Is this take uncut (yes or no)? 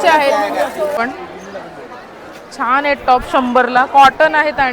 no